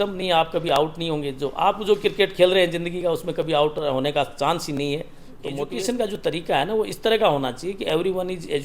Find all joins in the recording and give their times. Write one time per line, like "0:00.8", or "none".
0:05.7